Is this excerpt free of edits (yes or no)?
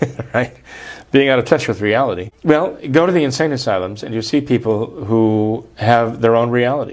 no